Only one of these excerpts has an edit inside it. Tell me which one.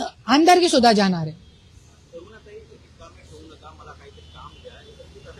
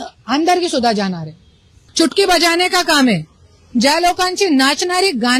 second; 1 cut; at 1.8 s

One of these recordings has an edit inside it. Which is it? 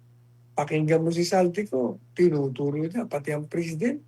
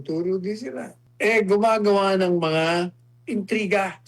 second; 1 cut; at 1.0 s

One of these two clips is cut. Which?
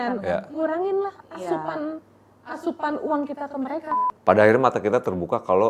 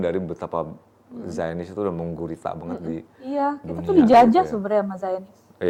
first; 1 cut; at 4.0 s

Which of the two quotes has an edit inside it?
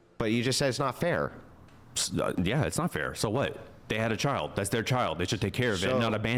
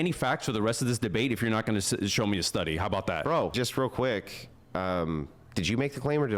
second; 1 cut; at 3.5 s

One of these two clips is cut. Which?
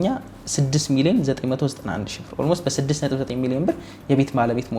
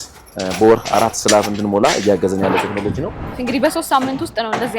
second; 1 cut; at 3.3 s

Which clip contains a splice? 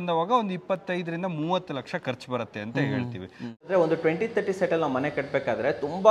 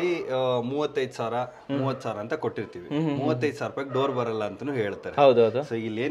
first; 1 cut; at 3.6 s

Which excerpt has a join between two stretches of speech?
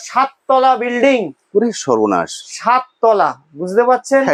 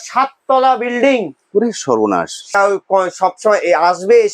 second; 1 cut; at 2.5 s

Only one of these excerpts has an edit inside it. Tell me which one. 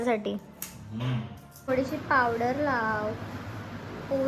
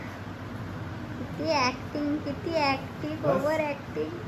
first; 1 cut; at 1.5 s

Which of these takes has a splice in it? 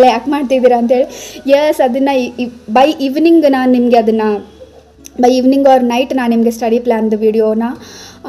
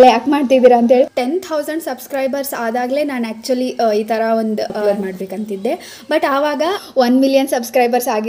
second; 3 cuts; at 1.2 s, 4.8 s, 6.8 s

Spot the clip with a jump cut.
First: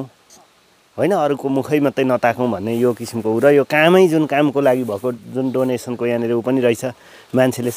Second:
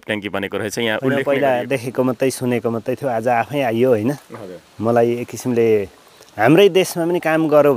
second; 1 cut; at 1.0 s

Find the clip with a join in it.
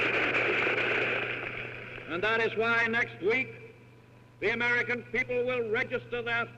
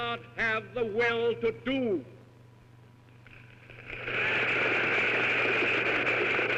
first; 1 cut; at 2.1 s

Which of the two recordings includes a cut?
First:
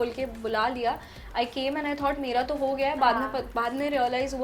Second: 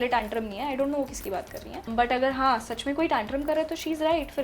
second; 1 cut; at 1.9 s

